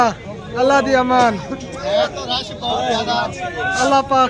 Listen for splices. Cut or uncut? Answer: uncut